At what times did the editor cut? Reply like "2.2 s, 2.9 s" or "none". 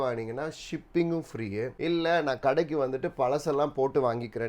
1.7 s